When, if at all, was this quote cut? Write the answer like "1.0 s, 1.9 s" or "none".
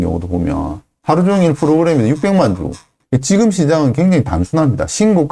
2.9 s